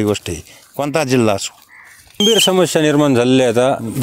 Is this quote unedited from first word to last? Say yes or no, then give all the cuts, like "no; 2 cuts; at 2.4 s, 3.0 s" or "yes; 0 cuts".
no; 1 cut; at 2.2 s